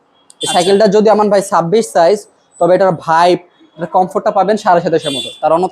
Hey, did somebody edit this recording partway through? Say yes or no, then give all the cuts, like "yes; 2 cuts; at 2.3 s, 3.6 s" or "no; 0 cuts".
no; 0 cuts